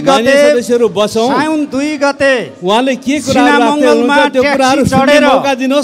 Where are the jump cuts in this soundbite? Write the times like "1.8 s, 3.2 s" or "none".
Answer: none